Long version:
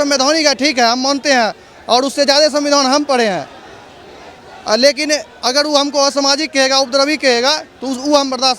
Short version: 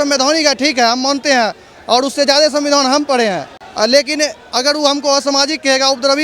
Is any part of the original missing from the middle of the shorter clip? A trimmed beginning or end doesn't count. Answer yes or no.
yes